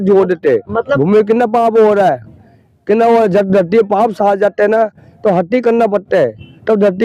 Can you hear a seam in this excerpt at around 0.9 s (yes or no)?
yes